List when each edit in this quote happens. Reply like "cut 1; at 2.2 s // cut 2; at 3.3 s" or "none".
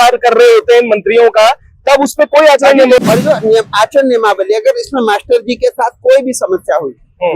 cut 1; at 3.0 s